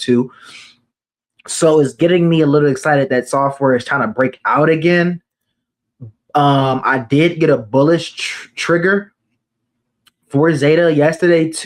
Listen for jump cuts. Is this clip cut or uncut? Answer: uncut